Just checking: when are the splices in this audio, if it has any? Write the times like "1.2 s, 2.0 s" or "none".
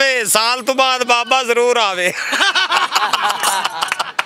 none

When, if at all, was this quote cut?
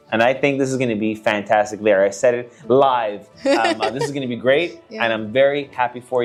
none

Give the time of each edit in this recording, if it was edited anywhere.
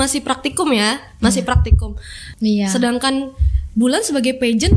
2.3 s

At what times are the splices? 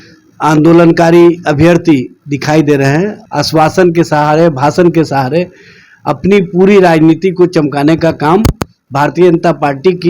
3.2 s

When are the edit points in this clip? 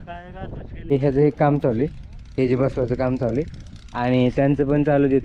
0.9 s

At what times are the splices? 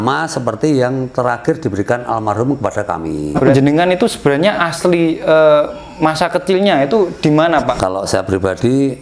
3.3 s, 7.8 s

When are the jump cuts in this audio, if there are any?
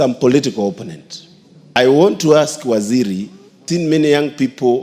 3.6 s

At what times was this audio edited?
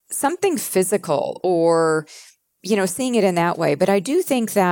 none

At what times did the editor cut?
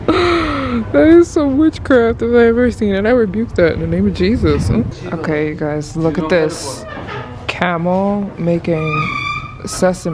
4.9 s

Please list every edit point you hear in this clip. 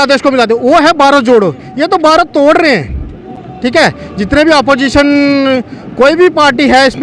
none

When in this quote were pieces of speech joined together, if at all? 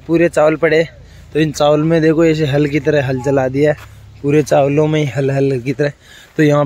none

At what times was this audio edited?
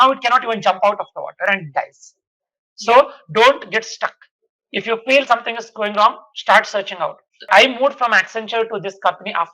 7.5 s

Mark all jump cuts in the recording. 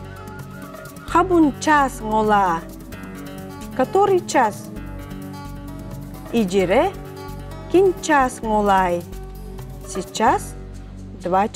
1.1 s

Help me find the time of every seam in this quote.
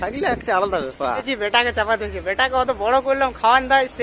1.3 s

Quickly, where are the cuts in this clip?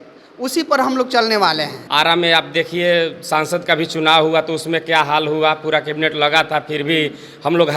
1.8 s

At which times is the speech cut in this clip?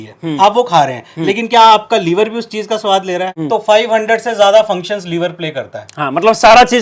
3.3 s

